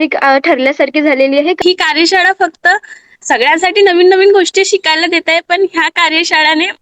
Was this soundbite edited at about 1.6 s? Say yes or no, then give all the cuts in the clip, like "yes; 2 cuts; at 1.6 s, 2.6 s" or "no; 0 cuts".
yes; 1 cut; at 1.6 s